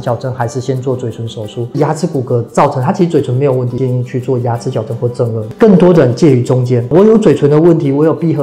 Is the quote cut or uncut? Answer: cut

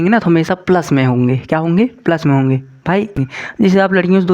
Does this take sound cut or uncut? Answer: cut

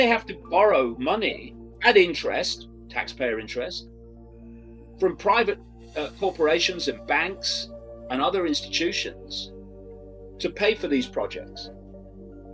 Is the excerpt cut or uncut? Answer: uncut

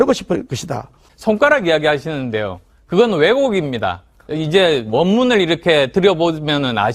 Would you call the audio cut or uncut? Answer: cut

